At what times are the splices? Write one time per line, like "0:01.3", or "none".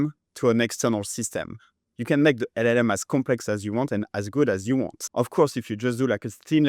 0:05.0